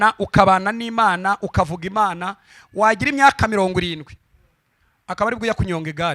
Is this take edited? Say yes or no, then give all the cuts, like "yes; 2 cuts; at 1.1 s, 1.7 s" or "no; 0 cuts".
no; 0 cuts